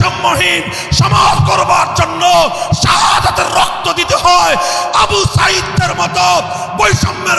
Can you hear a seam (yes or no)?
no